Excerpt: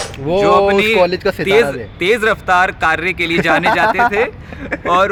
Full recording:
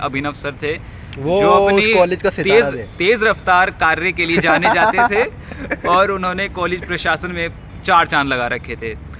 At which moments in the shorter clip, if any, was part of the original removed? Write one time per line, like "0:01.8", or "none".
none